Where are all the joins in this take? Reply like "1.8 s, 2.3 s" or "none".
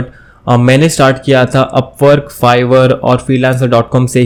none